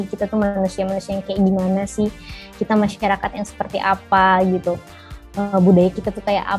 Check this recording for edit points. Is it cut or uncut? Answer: uncut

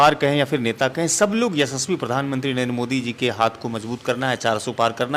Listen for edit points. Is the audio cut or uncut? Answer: uncut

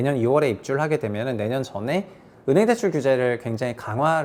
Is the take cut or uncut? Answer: uncut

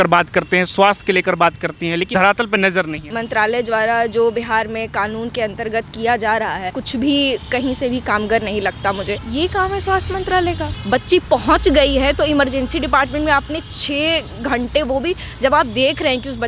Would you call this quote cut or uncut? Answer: cut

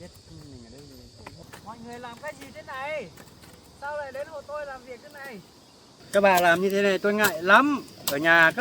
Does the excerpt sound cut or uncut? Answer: cut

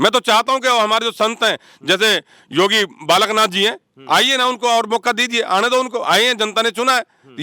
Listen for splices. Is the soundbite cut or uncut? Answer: uncut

